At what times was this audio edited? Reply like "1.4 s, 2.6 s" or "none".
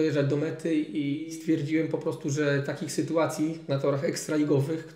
1.3 s